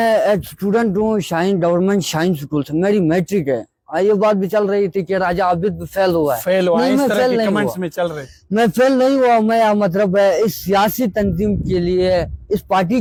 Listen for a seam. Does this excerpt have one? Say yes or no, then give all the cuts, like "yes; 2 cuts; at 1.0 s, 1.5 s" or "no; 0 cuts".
no; 0 cuts